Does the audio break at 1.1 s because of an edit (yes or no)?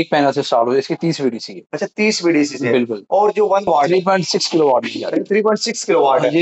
no